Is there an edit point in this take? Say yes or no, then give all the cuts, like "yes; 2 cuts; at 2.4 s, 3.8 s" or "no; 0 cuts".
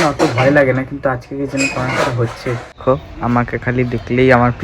yes; 1 cut; at 2.6 s